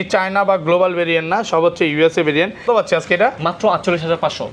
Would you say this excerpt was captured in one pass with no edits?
no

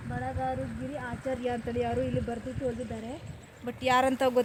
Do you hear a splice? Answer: no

